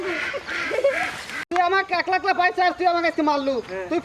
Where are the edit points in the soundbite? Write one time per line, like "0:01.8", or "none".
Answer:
0:01.3